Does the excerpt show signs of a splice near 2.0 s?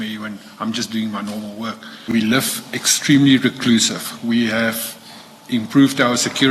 yes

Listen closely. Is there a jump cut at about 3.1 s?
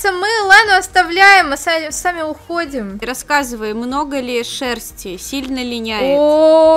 yes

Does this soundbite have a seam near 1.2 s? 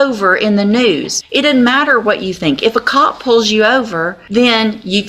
yes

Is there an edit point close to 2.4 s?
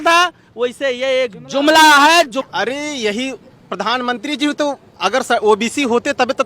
yes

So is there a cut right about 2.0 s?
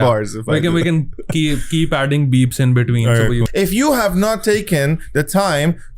no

